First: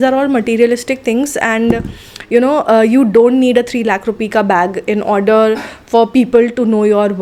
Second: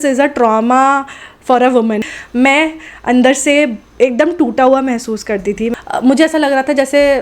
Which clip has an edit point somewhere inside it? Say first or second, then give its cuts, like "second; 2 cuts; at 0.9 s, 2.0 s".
second; 2 cuts; at 2.1 s, 5.7 s